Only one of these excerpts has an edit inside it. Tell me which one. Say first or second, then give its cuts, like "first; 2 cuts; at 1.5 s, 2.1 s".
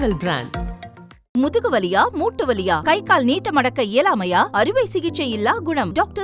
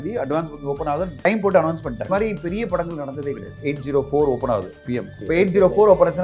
second; 4 cuts; at 1.3 s, 2.1 s, 3.6 s, 5.2 s